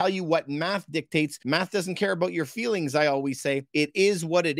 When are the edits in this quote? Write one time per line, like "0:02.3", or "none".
0:01.4
0:03.7